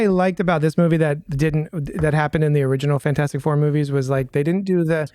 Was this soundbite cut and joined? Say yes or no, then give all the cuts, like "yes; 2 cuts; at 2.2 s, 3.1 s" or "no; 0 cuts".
no; 0 cuts